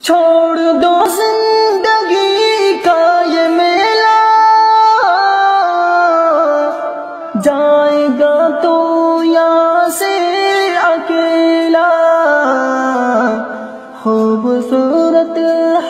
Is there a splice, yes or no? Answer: yes